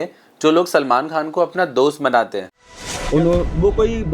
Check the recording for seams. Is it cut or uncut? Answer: cut